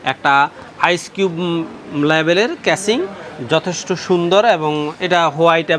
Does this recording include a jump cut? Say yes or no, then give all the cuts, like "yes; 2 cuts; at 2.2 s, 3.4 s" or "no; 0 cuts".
no; 0 cuts